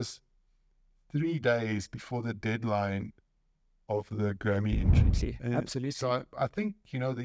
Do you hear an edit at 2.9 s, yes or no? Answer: no